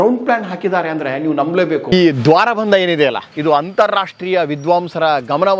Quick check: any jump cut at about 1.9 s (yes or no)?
yes